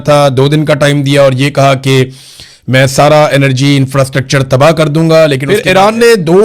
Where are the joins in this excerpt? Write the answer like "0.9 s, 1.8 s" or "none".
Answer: 5.4 s